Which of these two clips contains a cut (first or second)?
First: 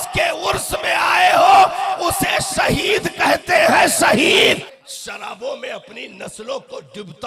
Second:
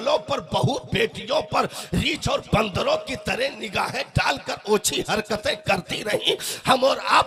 first